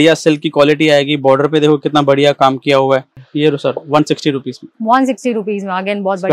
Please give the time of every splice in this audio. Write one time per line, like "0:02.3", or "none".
0:03.2